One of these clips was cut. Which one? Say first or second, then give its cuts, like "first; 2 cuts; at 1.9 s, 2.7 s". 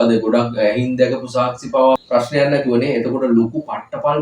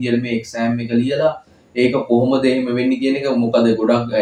first; 1 cut; at 2.0 s